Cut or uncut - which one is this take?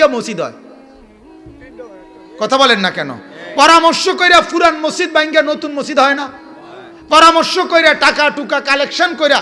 uncut